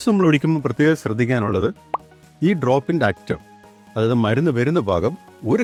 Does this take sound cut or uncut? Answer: uncut